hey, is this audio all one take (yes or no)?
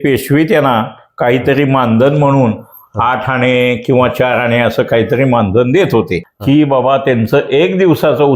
no